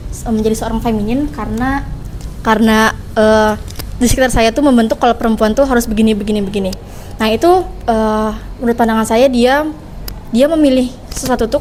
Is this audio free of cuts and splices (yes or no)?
yes